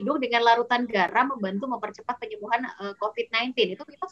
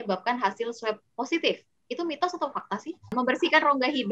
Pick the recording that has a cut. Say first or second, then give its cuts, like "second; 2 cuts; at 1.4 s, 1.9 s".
second; 1 cut; at 3.1 s